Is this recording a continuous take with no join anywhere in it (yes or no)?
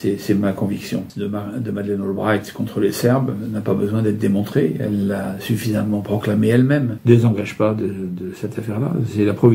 no